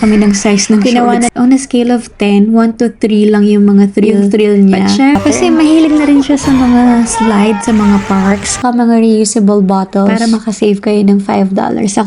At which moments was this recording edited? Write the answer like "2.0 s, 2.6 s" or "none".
1.3 s, 5.2 s, 8.5 s